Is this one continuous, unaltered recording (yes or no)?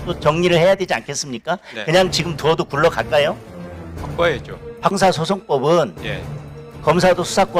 no